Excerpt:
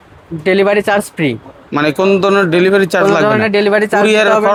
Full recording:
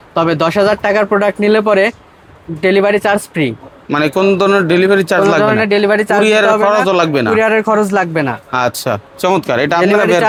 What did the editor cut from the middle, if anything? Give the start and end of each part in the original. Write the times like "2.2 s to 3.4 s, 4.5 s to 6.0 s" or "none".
none